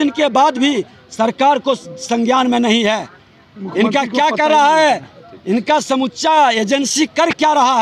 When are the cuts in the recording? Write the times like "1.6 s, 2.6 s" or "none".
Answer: none